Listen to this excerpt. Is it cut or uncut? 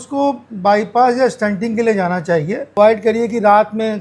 cut